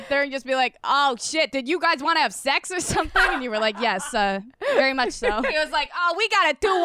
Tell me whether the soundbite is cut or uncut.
cut